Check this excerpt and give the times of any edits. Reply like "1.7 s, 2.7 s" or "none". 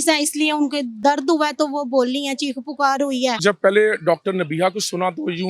1.0 s, 3.4 s